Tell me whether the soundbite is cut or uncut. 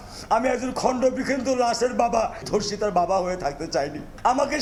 uncut